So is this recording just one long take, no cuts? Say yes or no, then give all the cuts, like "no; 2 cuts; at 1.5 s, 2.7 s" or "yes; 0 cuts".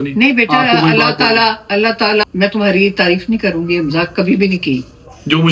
no; 1 cut; at 2.3 s